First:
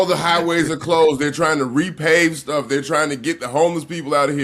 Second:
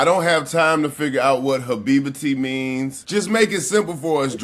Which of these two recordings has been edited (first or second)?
second